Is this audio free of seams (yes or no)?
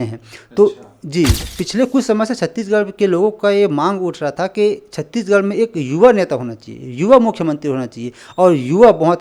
no